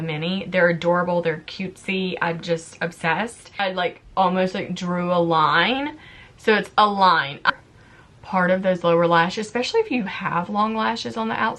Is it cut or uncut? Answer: cut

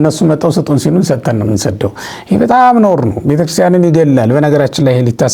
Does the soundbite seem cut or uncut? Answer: uncut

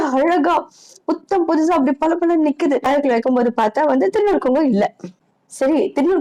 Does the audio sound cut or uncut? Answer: cut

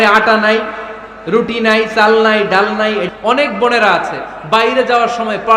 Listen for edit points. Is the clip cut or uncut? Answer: cut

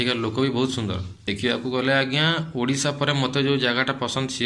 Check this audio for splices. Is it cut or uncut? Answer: cut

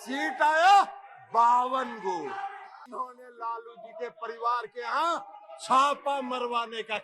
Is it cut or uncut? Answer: cut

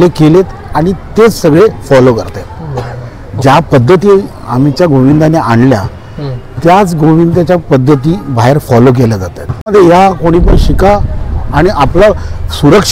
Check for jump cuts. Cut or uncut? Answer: cut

